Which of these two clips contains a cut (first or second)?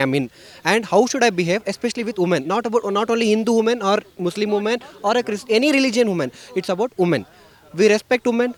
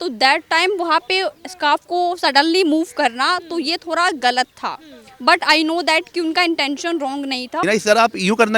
second